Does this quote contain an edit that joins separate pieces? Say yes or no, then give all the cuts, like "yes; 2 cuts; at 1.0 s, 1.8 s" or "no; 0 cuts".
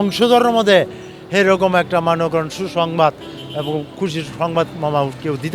no; 0 cuts